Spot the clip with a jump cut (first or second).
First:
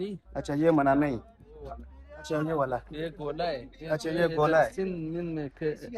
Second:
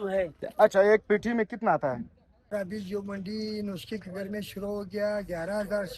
second